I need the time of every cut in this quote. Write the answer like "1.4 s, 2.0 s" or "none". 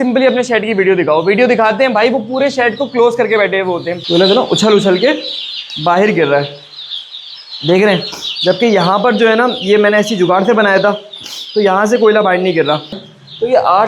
4.0 s, 13.0 s